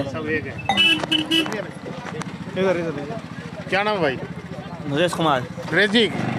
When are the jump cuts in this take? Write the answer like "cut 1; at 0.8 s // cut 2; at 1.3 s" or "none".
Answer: none